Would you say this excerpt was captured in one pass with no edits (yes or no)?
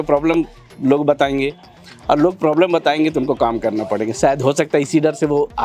yes